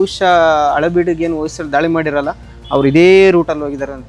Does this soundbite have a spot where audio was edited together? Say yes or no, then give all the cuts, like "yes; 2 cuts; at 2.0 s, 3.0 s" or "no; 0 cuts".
no; 0 cuts